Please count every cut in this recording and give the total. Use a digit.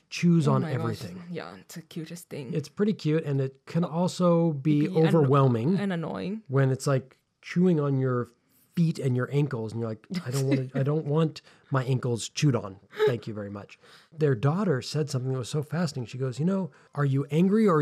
2